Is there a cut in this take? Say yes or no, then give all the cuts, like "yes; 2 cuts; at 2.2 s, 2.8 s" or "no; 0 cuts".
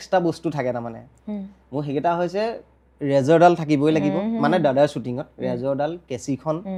no; 0 cuts